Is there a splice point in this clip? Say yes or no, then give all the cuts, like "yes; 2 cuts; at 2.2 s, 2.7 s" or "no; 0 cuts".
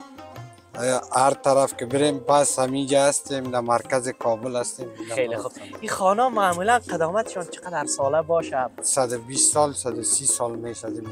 yes; 1 cut; at 8.8 s